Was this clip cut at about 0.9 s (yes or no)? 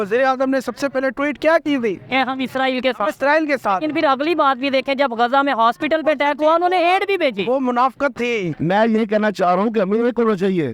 no